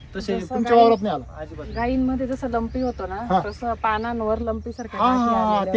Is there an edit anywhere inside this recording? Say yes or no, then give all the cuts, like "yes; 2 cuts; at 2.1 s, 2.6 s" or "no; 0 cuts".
no; 0 cuts